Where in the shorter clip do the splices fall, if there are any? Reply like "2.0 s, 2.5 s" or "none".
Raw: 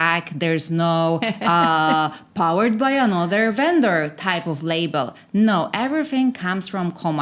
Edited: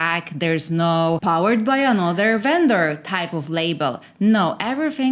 1.2 s